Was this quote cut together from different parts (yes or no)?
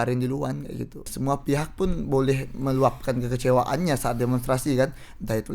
yes